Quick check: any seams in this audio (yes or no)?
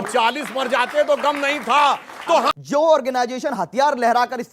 yes